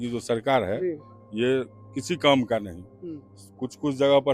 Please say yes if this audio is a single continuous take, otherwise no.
yes